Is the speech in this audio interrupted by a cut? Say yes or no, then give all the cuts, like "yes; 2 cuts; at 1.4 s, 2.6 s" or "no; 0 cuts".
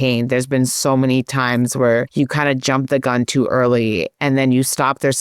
yes; 1 cut; at 2.1 s